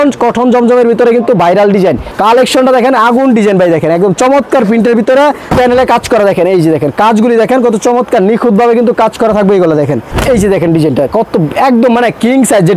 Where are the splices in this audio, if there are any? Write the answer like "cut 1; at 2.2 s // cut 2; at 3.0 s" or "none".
cut 1; at 2.1 s // cut 2; at 5.4 s // cut 3; at 10.1 s